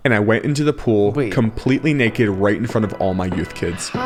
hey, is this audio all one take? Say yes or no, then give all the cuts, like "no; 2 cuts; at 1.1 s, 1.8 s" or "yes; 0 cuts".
yes; 0 cuts